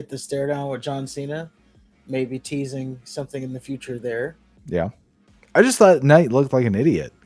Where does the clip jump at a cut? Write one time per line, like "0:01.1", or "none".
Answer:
none